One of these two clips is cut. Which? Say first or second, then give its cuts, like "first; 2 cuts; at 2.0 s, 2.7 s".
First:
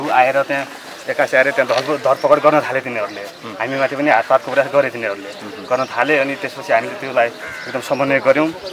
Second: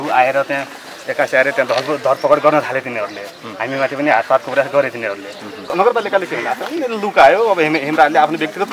second; 1 cut; at 5.7 s